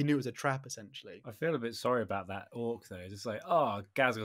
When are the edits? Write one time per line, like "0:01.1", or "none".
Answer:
0:01.2